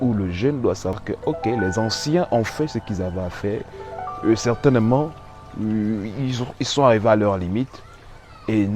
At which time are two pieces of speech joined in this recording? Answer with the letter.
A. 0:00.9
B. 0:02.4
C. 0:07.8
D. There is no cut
A